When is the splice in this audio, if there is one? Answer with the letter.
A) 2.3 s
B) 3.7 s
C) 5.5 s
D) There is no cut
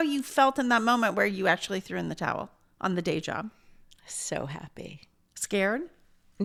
D